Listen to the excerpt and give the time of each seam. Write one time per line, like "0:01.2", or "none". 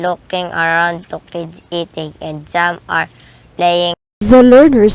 none